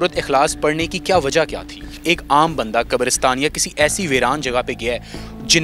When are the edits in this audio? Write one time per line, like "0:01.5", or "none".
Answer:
0:02.0

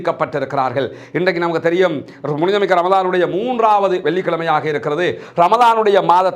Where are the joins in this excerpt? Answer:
none

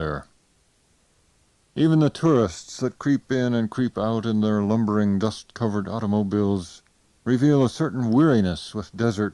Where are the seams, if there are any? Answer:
0:05.5

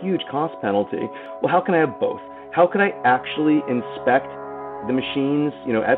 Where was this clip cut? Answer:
0:01.2
0:04.8

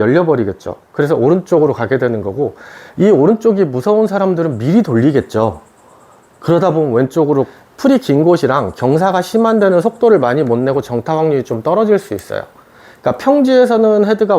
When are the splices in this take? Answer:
0:07.6

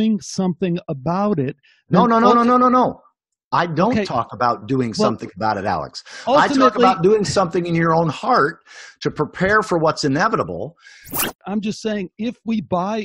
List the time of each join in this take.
0:11.4

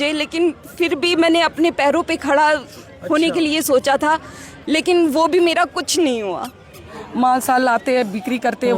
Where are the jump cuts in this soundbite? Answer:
0:07.0

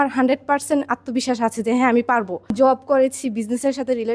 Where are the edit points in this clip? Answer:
0:02.5

